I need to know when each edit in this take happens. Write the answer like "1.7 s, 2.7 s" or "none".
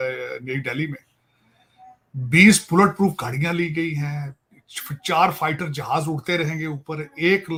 none